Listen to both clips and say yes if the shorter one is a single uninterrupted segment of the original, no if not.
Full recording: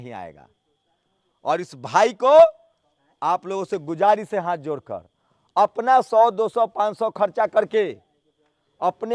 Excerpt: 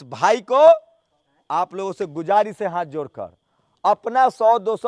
yes